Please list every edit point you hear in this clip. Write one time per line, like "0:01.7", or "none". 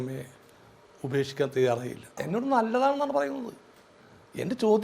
0:02.2